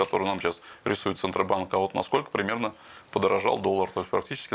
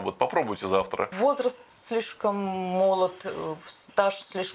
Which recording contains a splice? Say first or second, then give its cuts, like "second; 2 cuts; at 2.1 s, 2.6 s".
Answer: second; 1 cut; at 1.1 s